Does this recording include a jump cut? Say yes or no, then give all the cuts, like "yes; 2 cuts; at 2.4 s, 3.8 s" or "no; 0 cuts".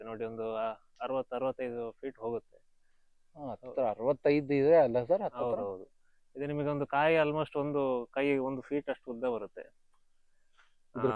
no; 0 cuts